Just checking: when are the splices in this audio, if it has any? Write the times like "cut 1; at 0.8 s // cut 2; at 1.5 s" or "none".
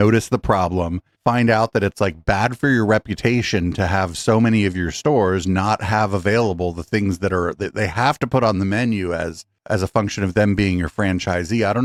none